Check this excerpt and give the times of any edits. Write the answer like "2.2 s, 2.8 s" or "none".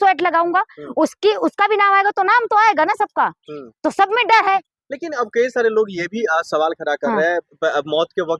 none